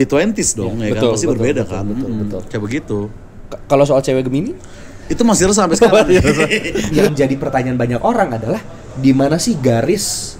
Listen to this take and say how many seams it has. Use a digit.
1